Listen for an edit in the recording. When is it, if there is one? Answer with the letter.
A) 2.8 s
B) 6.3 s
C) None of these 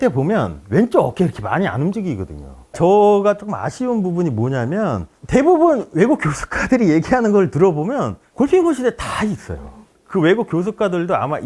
A